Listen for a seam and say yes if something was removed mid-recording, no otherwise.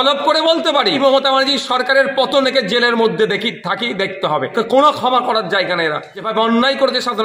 yes